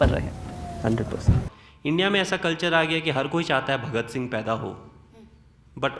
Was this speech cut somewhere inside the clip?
yes; 1 cut; at 1.5 s

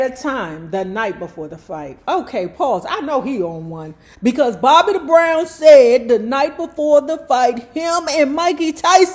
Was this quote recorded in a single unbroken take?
yes; 0 cuts

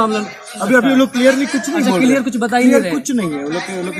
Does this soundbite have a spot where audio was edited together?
no; 0 cuts

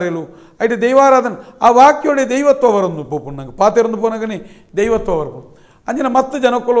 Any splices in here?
no; 0 cuts

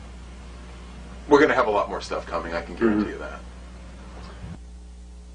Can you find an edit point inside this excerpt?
yes; 1 cut; at 1.1 s

